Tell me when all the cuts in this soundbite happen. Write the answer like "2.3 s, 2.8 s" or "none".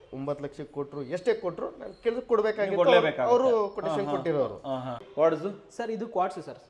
5.0 s